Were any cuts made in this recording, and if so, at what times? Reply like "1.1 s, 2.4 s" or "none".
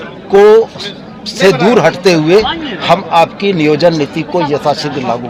none